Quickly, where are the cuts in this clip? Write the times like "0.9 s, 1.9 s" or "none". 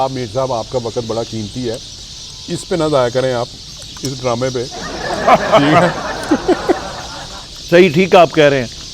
none

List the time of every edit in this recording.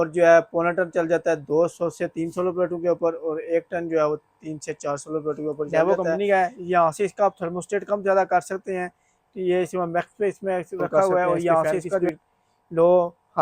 5.7 s

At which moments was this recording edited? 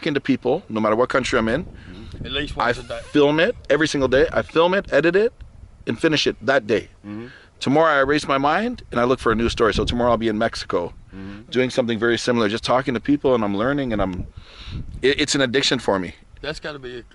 none

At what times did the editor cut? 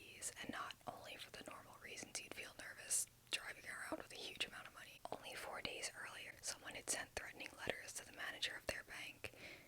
4.8 s, 6.3 s

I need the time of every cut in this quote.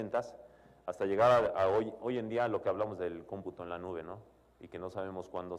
1.3 s

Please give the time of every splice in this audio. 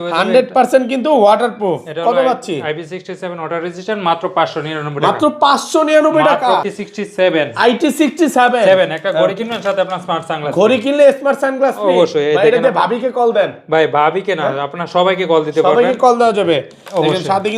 6.6 s

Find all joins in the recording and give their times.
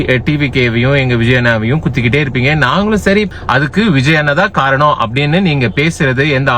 3.3 s

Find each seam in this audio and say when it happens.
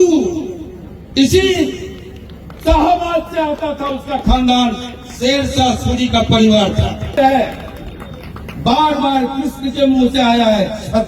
7.2 s

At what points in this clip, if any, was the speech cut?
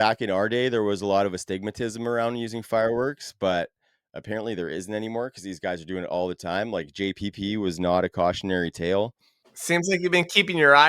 9.8 s

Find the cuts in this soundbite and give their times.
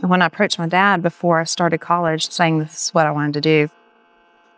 2.3 s

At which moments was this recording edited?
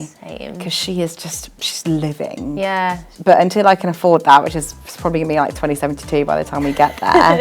3.1 s

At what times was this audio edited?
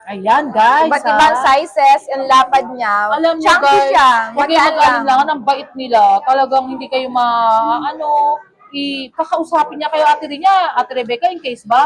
none

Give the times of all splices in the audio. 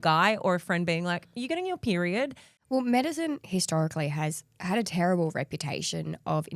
2.5 s

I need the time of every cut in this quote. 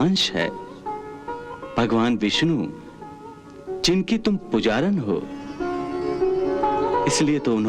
5.4 s

